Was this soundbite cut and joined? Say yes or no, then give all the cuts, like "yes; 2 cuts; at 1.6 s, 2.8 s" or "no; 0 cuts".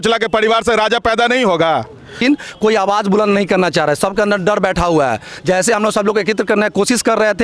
yes; 1 cut; at 2.2 s